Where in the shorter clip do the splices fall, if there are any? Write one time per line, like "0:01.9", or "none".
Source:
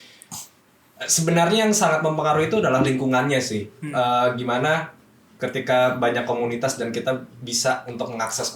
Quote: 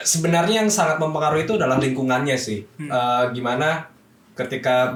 none